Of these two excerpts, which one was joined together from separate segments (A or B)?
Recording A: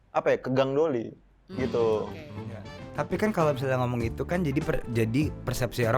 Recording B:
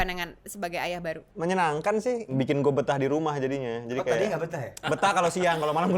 B